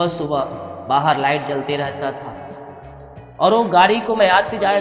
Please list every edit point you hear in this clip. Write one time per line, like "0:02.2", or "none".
none

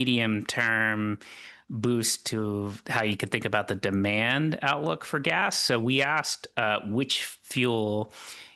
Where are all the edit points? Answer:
none

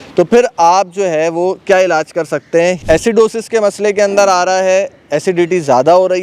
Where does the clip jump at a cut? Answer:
0:02.8

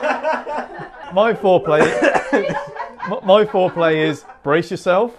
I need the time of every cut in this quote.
0:01.0

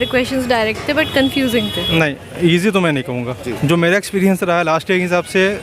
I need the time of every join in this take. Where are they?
0:01.8

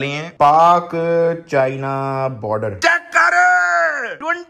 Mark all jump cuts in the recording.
0:02.8

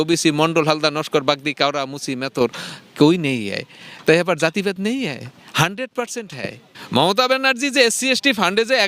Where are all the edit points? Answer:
0:06.7

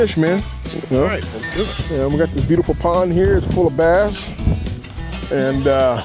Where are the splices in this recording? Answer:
none

